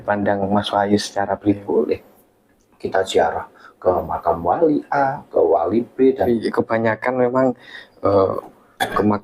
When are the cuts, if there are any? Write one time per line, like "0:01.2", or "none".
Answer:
0:01.6
0:06.3